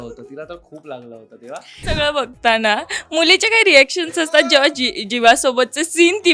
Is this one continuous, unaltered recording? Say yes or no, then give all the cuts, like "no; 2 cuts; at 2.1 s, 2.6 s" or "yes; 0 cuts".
no; 1 cut; at 1.8 s